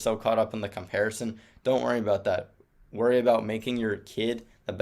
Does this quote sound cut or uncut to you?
uncut